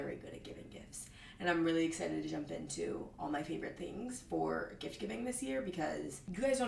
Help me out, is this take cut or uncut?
uncut